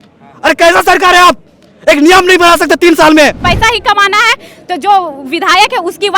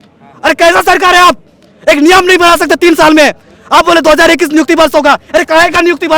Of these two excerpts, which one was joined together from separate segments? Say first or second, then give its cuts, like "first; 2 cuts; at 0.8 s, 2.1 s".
first; 1 cut; at 3.4 s